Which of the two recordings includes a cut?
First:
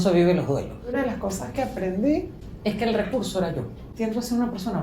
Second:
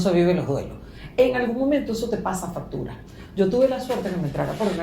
first; 3 cuts; at 0.9 s, 2.4 s, 3.8 s

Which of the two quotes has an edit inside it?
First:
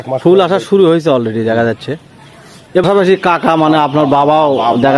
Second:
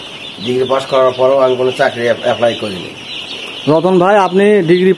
first; 1 cut; at 2.8 s

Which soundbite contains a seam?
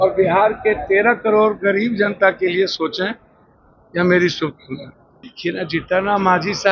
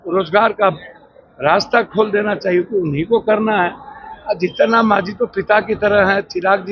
first; 1 cut; at 5.3 s

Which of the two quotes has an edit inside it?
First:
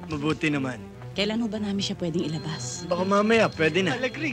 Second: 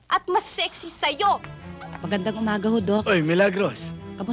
second; 1 cut; at 1.6 s

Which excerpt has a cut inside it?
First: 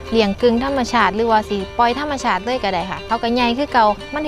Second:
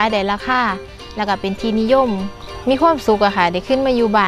second; 1 cut; at 2.5 s

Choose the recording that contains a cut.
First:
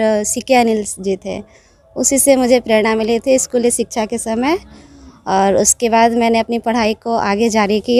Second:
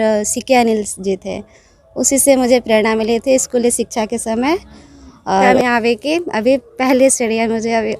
second; 1 cut; at 5.5 s

